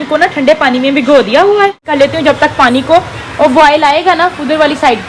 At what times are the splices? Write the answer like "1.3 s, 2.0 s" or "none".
1.9 s